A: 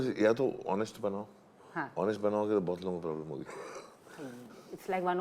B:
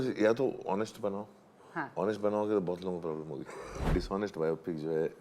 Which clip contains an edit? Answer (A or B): B